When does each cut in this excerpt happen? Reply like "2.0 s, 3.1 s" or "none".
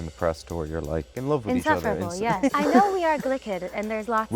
1.1 s, 2.5 s